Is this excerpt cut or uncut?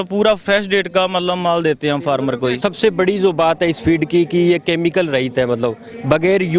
cut